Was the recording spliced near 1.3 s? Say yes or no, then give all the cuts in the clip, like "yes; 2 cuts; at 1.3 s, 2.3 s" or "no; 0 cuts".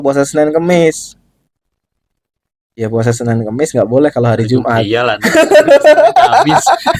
no; 0 cuts